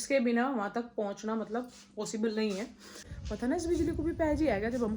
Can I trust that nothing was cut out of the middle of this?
no; 1 cut; at 3.1 s

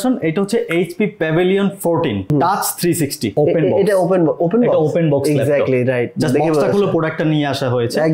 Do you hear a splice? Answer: yes; 2 cuts; at 2.3 s, 3.3 s

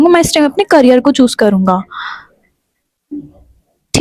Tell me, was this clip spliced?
no; 0 cuts

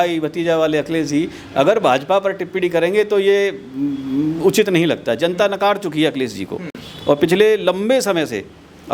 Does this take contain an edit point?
no; 0 cuts

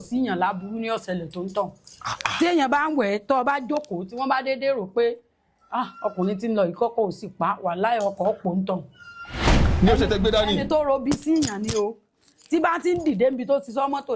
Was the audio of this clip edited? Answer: no; 0 cuts

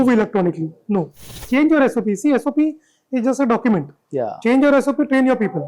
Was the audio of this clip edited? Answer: yes; 1 cut; at 1.3 s

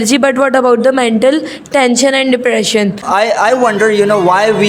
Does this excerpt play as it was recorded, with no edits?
no; 1 cut; at 3.0 s

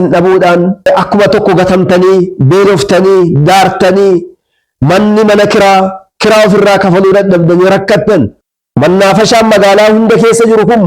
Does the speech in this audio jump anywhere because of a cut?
yes; 2 cuts; at 0.9 s, 8.4 s

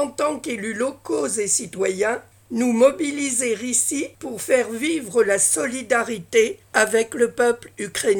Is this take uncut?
no; 3 cuts; at 2.3 s, 4.2 s, 6.6 s

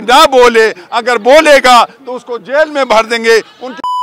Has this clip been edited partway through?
no; 0 cuts

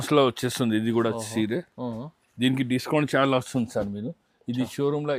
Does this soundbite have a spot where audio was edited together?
no; 0 cuts

